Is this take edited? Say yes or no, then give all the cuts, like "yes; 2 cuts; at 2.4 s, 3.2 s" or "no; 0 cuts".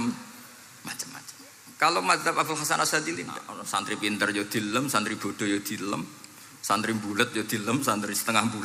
yes; 1 cut; at 3.6 s